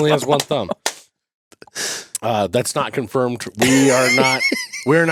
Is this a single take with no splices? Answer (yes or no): yes